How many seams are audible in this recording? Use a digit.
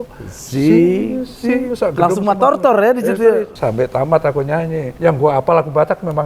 2